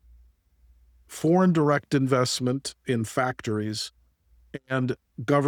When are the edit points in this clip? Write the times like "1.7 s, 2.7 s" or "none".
none